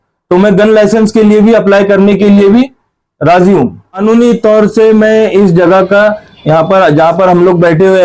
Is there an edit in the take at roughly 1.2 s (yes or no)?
no